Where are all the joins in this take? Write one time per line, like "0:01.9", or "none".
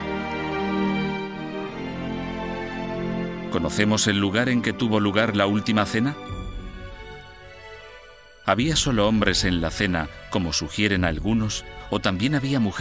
0:02.9

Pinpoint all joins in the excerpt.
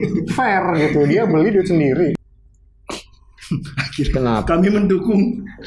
0:02.2

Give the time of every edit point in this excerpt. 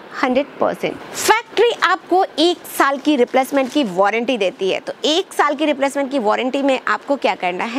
0:01.1

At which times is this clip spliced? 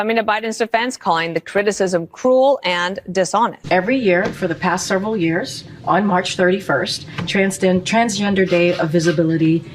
0:03.6

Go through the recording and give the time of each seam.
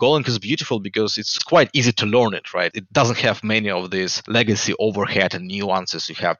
0:01.2
0:02.8
0:04.2

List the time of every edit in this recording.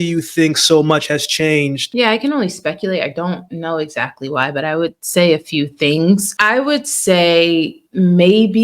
0:01.8
0:06.3

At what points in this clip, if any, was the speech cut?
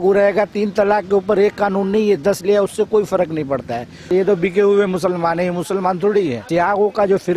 0:04.1
0:06.4

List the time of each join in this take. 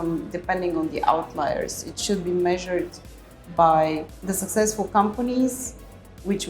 0:04.1

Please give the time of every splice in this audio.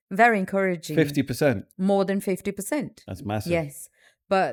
none

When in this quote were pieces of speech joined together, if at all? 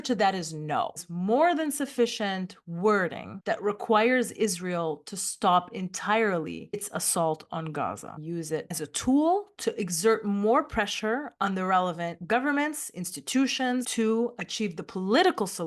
0:01.1
0:08.5
0:13.9

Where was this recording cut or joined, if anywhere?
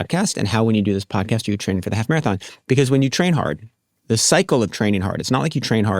0:02.5

